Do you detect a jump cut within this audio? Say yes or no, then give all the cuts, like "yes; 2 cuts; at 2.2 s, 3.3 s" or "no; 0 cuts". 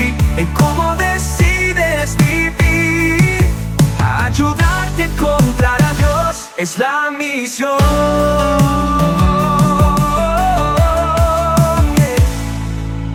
no; 0 cuts